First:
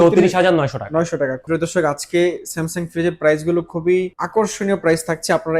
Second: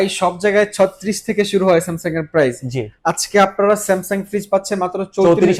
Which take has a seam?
first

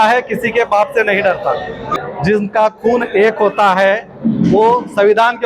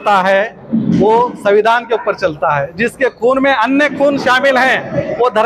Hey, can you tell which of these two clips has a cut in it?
first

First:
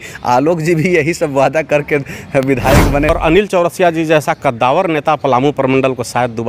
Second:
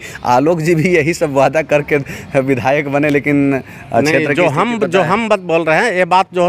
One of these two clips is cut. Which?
first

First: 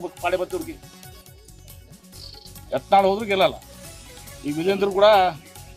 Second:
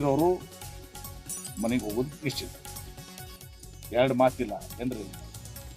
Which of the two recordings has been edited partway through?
second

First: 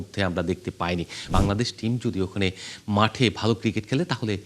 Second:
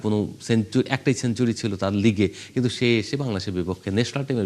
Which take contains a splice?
first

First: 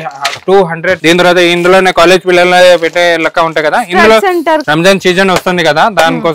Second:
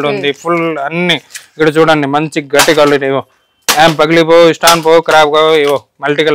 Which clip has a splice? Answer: first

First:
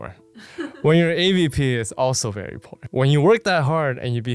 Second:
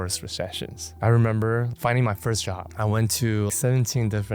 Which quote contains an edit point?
second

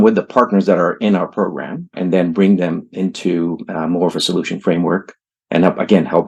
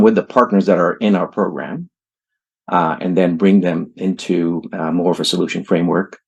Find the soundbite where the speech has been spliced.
first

